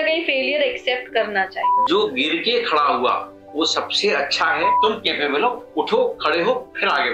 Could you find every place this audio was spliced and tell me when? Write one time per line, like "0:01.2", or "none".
0:01.7
0:04.8